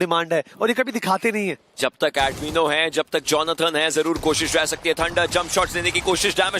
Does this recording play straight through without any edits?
no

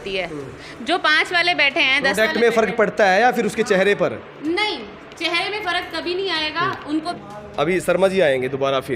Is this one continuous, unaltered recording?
no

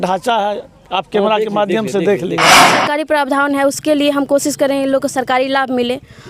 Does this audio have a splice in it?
yes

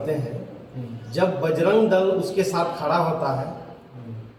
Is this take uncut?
yes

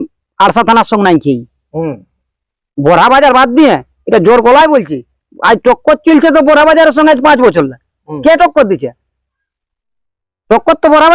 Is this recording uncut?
yes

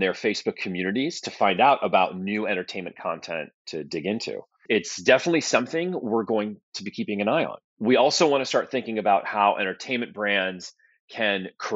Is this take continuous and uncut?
no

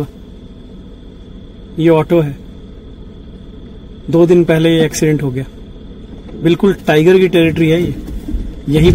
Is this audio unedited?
yes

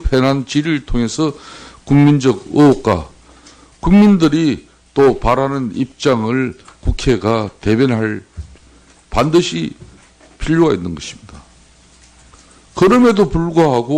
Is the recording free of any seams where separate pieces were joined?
no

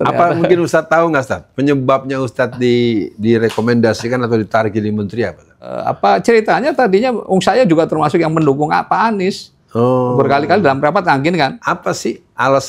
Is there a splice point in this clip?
yes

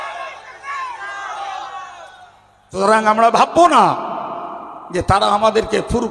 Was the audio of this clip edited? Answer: yes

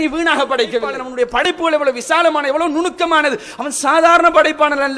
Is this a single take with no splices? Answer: no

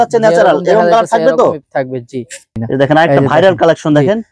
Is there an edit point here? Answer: yes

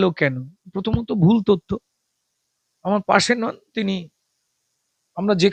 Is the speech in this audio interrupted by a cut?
no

